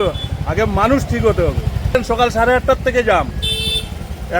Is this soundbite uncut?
no; 1 cut; at 1.9 s

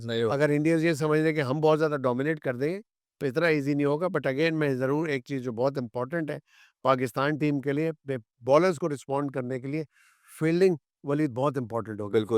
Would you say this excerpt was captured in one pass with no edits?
yes; 0 cuts

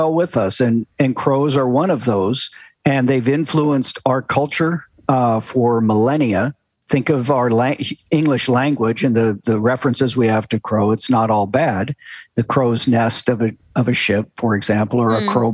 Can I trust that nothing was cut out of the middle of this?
yes; 0 cuts

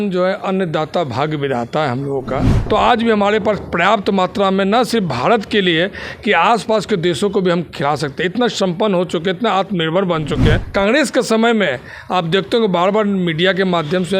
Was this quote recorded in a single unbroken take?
no; 2 cuts; at 2.5 s, 10.6 s

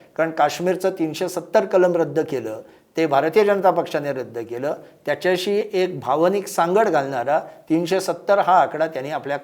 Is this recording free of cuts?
yes; 0 cuts

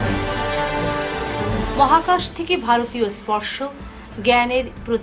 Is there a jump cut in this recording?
no; 0 cuts

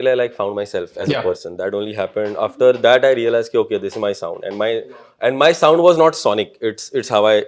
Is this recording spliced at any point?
no; 0 cuts

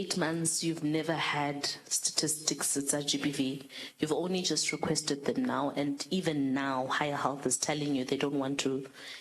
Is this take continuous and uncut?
yes; 0 cuts

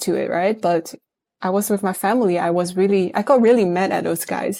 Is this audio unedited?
yes; 0 cuts

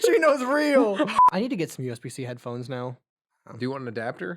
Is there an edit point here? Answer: yes; 1 cut; at 1.1 s

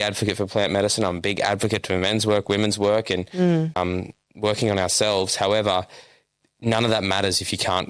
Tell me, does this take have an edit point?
yes; 1 cut; at 3.8 s

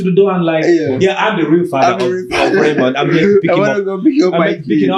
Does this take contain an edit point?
no; 0 cuts

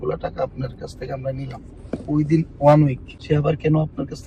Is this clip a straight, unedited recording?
yes; 0 cuts

